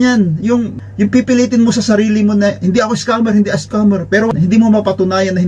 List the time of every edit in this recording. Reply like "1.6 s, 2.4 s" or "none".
none